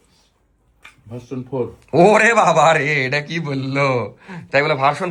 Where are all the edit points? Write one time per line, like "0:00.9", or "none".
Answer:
none